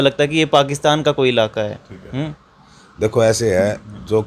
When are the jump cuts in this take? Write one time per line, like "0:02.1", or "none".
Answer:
none